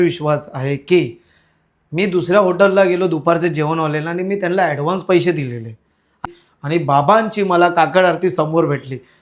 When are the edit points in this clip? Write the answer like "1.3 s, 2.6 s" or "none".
6.1 s